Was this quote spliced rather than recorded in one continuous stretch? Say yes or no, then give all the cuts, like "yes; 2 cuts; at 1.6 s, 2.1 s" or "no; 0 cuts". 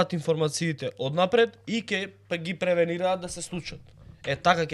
no; 0 cuts